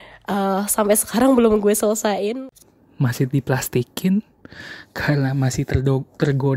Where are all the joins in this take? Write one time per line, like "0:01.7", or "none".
0:02.3